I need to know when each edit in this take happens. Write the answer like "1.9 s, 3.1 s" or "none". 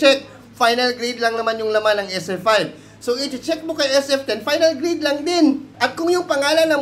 5.7 s